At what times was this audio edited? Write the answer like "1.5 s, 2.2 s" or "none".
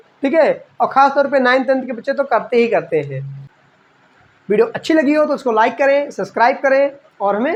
none